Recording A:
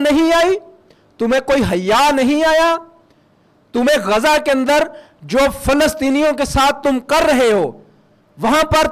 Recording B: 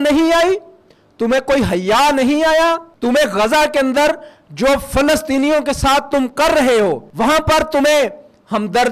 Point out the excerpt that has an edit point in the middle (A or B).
B